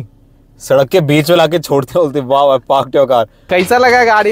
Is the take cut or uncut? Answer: cut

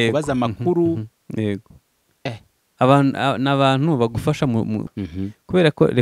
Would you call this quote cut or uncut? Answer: cut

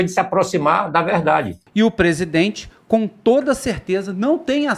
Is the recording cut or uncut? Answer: cut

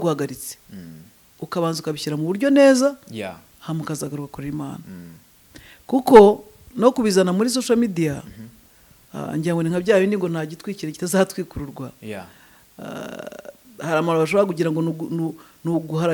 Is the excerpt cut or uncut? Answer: uncut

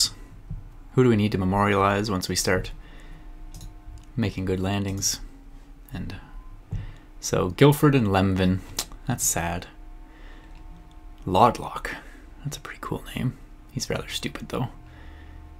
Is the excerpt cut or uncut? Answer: cut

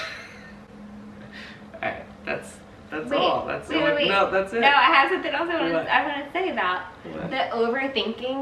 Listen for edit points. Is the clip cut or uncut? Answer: uncut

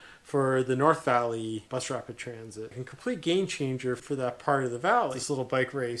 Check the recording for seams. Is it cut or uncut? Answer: cut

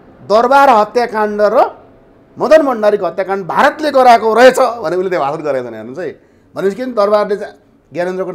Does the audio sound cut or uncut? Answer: uncut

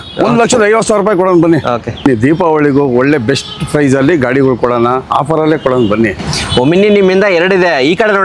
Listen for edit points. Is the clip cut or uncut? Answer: cut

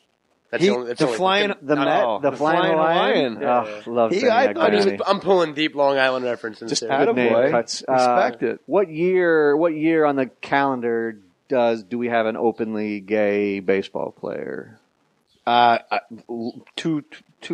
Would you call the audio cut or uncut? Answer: cut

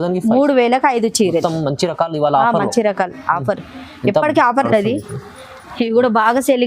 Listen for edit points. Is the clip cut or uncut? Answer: cut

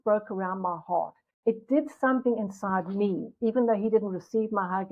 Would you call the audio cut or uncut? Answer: cut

